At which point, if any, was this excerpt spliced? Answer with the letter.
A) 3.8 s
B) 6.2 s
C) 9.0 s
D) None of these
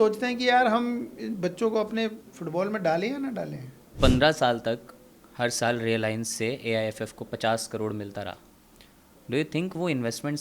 A